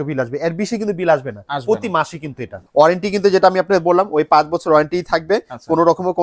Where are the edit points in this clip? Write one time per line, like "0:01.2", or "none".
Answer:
0:02.6